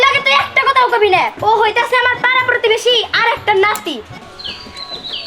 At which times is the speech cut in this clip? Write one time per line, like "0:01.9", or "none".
0:04.1